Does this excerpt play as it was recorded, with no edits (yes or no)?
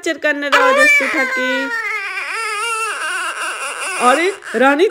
yes